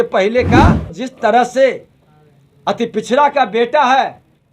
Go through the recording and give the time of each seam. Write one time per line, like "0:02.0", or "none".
0:01.0